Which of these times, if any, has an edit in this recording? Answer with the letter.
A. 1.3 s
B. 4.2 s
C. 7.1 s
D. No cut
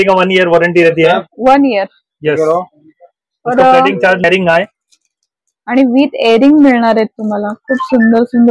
B